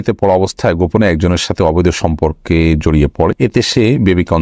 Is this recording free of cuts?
no; 1 cut; at 3.4 s

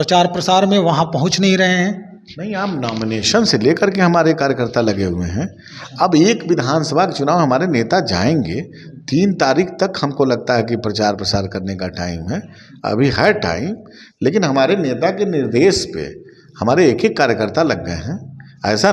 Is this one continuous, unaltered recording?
yes; 0 cuts

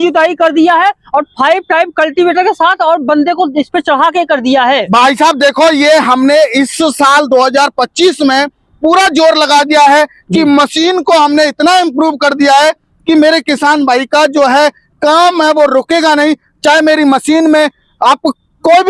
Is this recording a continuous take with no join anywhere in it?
yes; 0 cuts

